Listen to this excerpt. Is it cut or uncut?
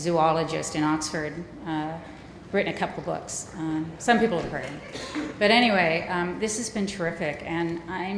cut